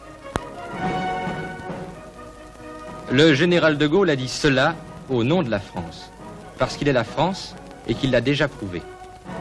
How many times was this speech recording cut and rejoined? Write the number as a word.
one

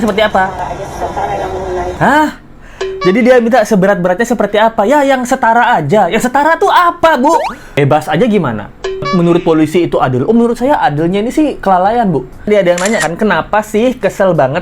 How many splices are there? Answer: three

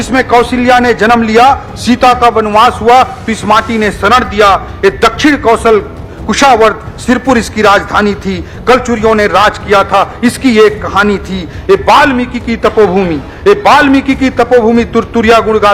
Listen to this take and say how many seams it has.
zero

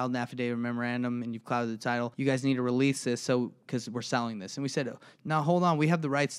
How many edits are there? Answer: one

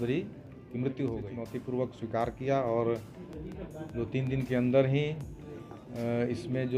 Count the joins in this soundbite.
one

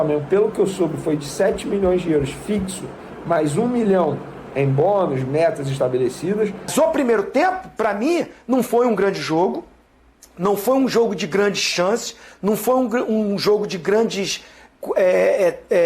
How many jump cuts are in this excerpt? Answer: one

